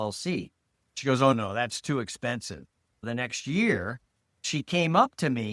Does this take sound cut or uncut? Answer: cut